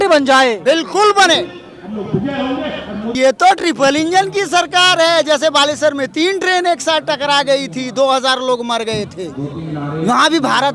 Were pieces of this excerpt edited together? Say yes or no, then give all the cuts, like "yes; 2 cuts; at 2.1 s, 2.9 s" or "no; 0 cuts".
yes; 1 cut; at 3.1 s